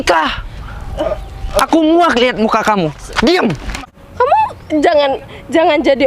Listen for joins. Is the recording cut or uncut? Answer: cut